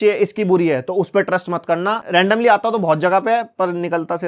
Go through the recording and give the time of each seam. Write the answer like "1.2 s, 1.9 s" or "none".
2.0 s